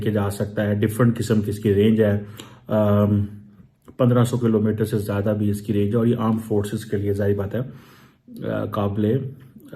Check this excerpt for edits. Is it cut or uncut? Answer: uncut